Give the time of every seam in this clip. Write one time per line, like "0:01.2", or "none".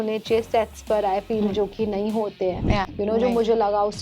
0:02.9